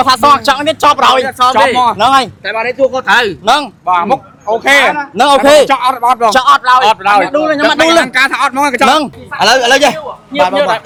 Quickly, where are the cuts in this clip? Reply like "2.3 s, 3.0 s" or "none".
none